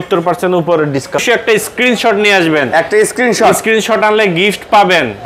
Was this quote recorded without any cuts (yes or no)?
no